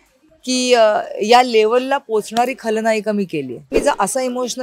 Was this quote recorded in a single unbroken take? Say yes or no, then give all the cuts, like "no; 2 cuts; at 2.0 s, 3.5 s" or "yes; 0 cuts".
no; 1 cut; at 3.7 s